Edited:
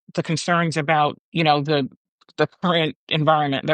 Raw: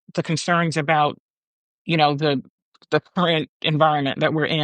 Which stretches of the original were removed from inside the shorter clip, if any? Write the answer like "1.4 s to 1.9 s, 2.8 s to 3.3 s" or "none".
1.2 s to 1.8 s